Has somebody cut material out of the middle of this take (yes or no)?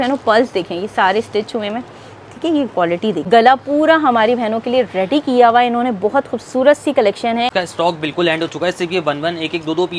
yes